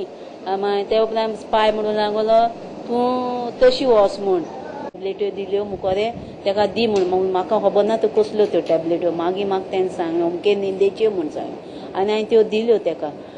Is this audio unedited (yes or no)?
no